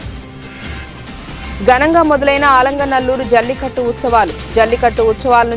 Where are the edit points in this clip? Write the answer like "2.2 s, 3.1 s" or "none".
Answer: 1.2 s